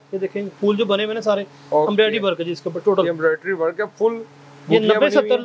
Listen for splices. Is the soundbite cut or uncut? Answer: uncut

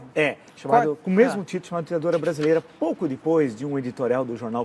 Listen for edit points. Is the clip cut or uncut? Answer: cut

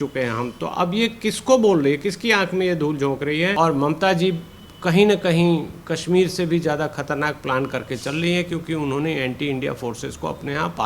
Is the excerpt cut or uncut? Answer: cut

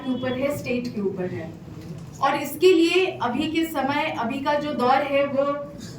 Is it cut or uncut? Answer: uncut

